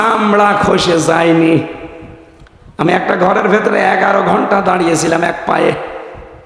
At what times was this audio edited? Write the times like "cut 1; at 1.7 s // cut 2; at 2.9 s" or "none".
none